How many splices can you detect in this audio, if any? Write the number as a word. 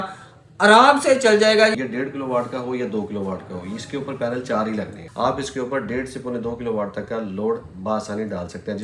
two